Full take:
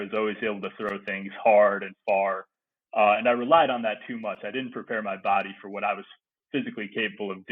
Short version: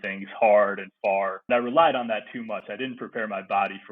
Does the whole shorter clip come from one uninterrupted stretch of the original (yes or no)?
no